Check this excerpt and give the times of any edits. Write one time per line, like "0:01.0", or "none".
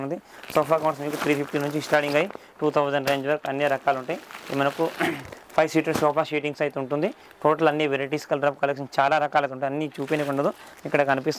none